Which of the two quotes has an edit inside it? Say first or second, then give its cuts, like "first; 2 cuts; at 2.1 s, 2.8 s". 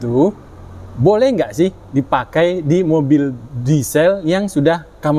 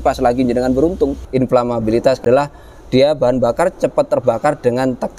second; 2 cuts; at 1.2 s, 2.2 s